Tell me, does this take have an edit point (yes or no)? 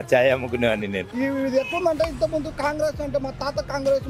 yes